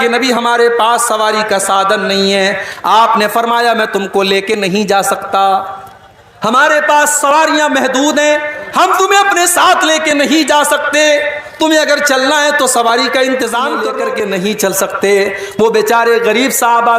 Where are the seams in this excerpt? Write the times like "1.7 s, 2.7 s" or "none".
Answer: 13.9 s